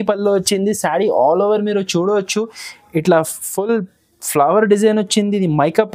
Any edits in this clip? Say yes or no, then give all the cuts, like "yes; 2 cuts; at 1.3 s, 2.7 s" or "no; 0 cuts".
no; 0 cuts